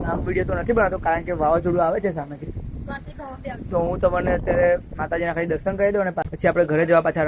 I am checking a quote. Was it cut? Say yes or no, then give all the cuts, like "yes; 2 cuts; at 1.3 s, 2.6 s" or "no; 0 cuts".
yes; 1 cut; at 6.3 s